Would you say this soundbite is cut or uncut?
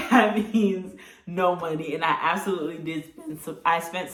uncut